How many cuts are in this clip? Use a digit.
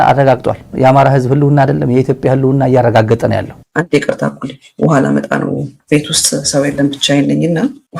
1